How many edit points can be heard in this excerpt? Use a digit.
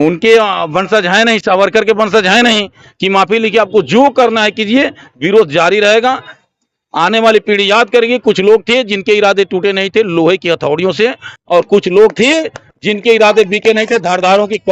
0